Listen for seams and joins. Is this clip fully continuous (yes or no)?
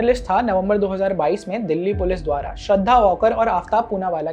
yes